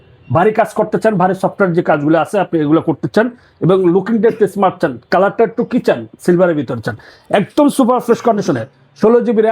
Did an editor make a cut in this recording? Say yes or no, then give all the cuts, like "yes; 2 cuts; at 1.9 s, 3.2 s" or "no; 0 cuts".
no; 0 cuts